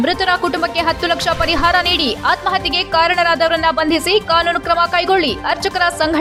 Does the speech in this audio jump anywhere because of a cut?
no; 0 cuts

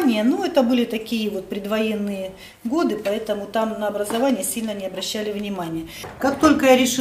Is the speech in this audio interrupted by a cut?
yes; 1 cut; at 6.1 s

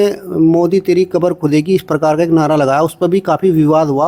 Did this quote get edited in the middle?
no; 0 cuts

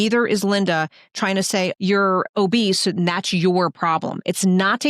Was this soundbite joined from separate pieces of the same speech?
no; 0 cuts

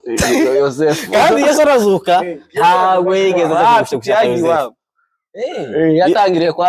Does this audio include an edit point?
no; 0 cuts

